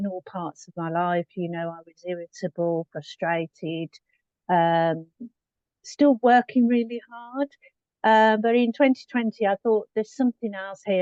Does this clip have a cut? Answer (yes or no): no